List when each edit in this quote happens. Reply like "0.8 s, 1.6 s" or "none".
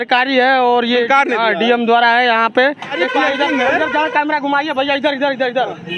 2.9 s